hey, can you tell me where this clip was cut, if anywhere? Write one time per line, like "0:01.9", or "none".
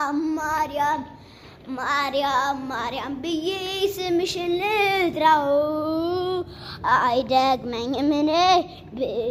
none